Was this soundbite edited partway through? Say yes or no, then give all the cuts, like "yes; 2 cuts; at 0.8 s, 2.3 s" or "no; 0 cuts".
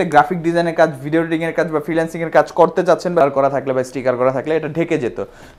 yes; 1 cut; at 3.2 s